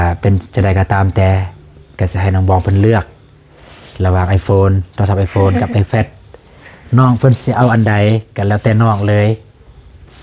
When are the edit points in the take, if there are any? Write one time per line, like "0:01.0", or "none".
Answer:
none